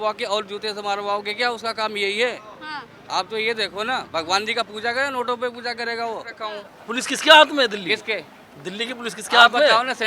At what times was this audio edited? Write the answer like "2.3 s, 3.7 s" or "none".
6.3 s

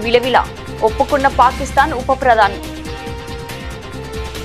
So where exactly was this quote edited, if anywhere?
2.5 s

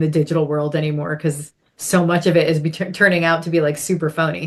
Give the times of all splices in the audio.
none

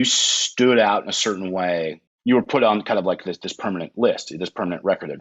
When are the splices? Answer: 2.0 s

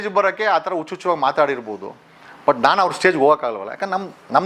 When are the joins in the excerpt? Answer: none

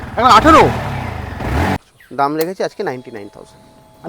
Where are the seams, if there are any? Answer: 1.8 s

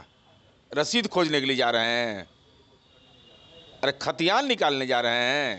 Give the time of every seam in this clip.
none

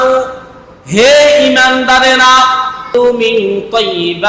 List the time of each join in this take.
2.9 s

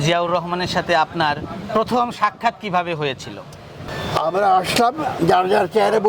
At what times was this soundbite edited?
3.8 s

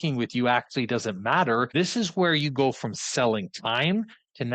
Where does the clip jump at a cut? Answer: 1.7 s

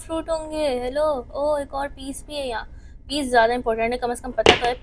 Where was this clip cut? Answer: none

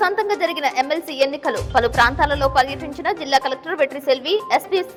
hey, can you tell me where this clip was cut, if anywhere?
none

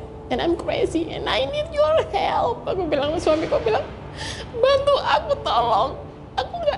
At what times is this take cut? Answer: none

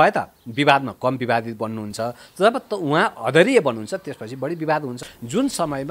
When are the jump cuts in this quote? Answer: 5.0 s

